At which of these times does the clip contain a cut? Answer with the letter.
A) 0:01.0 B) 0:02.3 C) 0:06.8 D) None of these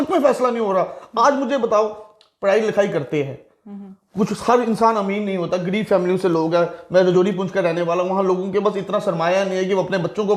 D